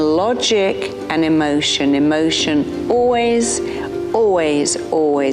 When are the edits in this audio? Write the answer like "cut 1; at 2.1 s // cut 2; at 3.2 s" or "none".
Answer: none

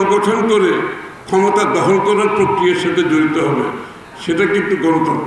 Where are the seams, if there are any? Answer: none

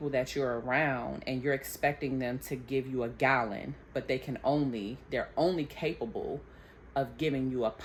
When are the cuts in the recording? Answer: none

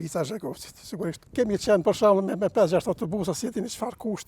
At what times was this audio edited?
cut 1; at 1.2 s

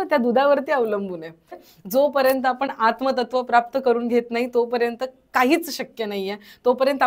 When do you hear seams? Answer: cut 1; at 1.6 s

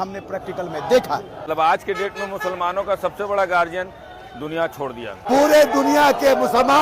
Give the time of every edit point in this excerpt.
cut 1; at 1.4 s // cut 2; at 5.2 s

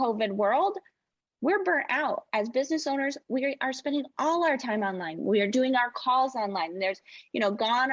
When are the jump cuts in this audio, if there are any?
none

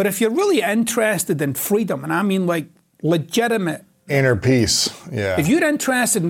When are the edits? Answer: cut 1; at 4.1 s

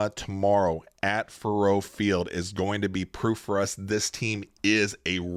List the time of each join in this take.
none

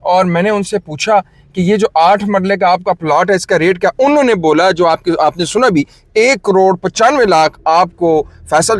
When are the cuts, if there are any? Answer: none

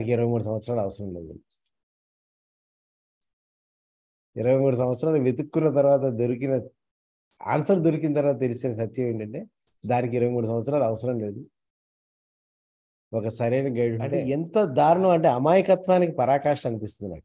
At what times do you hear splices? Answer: cut 1; at 14.2 s

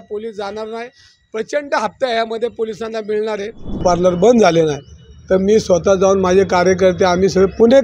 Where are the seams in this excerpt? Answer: cut 1; at 3.8 s

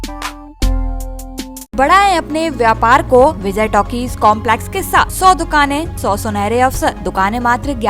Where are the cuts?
cut 1; at 1.7 s // cut 2; at 3.4 s // cut 3; at 5.1 s // cut 4; at 5.9 s // cut 5; at 7.0 s

